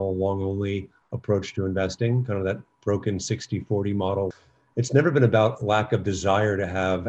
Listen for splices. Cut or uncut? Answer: cut